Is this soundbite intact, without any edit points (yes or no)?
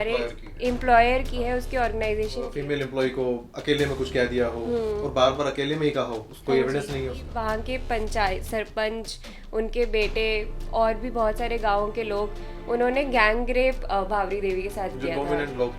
no